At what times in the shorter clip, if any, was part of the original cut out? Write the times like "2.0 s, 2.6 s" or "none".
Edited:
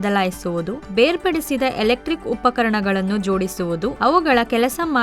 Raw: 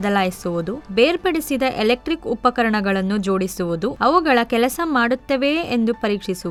none